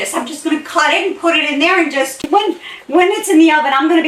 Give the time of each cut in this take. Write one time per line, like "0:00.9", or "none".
0:02.3